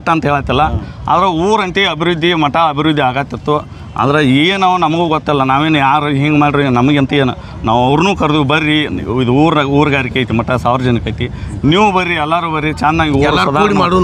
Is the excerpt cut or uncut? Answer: uncut